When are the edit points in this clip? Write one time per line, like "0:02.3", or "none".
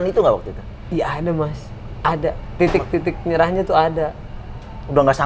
none